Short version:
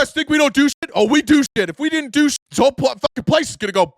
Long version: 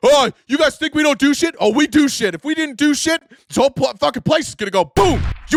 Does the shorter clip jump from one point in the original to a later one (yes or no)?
yes